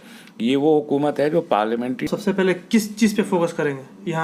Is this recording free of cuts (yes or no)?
no